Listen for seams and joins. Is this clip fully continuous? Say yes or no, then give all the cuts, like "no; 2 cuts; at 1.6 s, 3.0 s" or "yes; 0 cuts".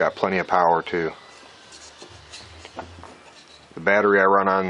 no; 1 cut; at 2.8 s